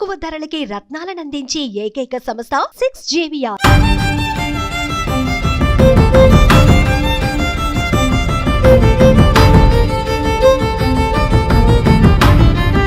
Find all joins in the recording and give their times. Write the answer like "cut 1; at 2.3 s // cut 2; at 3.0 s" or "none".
none